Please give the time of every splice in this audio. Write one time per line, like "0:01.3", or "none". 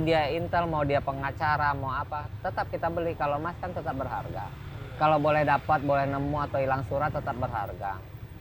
none